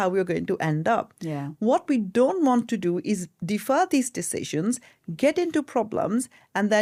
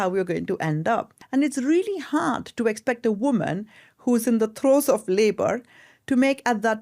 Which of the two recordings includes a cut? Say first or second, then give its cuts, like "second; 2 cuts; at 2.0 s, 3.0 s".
second; 1 cut; at 1.2 s